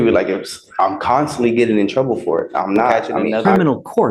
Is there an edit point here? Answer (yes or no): yes